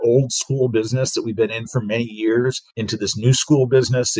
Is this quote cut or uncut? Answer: cut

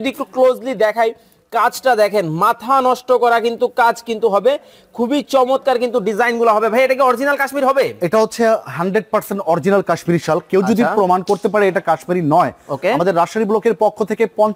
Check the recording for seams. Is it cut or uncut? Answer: uncut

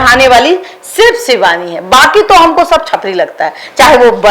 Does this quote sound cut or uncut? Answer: uncut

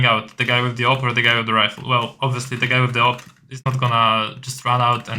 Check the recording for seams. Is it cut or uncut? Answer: uncut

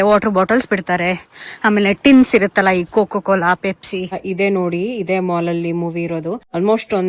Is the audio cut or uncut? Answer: cut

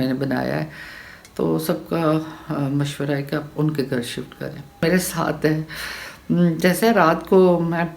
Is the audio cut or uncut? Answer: cut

